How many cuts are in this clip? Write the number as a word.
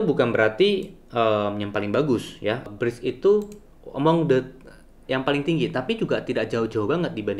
one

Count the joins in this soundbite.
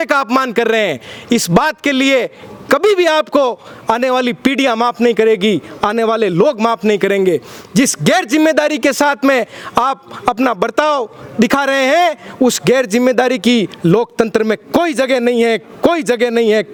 zero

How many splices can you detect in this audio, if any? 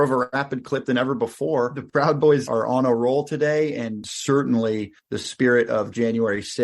one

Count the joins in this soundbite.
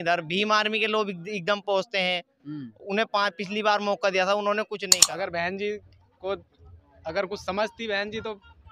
one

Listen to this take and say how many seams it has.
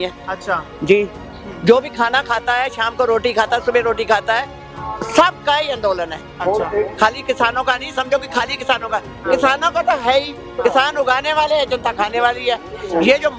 zero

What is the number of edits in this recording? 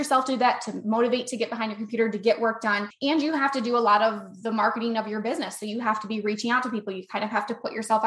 one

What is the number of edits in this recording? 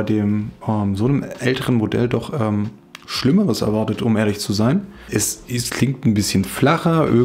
one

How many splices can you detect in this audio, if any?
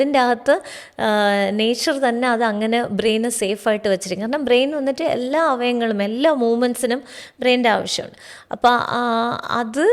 zero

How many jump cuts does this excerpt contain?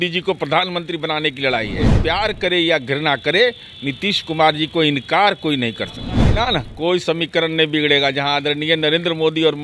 two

